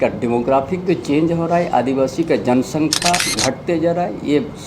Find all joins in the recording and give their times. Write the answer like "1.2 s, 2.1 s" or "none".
3.3 s